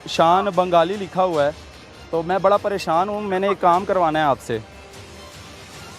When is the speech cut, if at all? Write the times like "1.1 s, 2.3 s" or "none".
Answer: none